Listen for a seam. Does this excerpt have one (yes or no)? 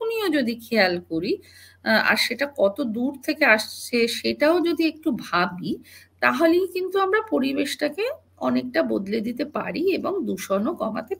no